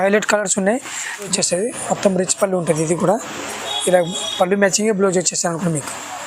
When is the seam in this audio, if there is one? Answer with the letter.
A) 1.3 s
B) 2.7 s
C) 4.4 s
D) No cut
A